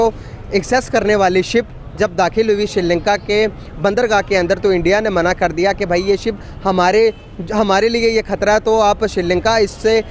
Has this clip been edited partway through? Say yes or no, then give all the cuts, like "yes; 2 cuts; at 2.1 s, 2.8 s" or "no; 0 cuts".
no; 0 cuts